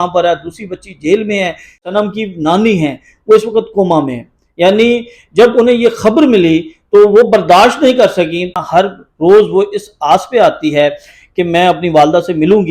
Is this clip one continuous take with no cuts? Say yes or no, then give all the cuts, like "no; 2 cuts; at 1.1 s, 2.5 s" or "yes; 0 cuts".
no; 2 cuts; at 1.9 s, 8.5 s